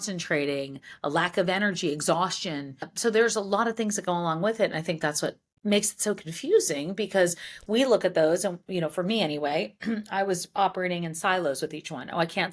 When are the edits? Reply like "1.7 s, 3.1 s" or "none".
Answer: 2.9 s, 5.5 s